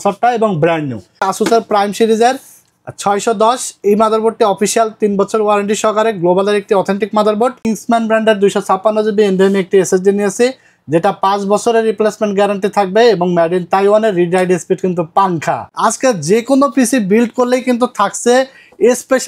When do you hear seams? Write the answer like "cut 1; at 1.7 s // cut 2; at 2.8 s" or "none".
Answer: cut 1; at 1.3 s // cut 2; at 7.6 s // cut 3; at 15.7 s